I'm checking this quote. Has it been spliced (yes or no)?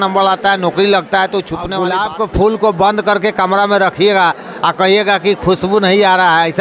yes